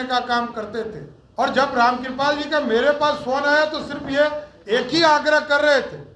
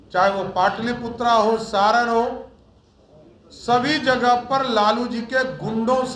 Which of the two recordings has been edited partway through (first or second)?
first